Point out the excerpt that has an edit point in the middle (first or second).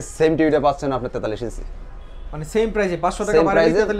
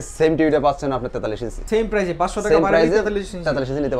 second